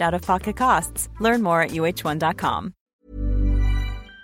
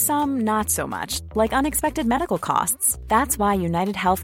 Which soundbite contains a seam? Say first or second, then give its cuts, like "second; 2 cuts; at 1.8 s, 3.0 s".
first; 1 cut; at 2.9 s